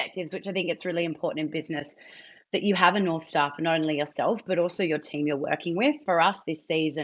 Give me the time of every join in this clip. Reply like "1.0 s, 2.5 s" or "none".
6.0 s